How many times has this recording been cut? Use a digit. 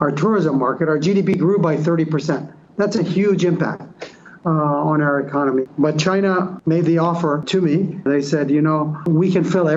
4